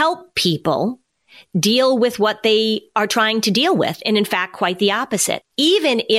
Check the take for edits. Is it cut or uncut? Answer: uncut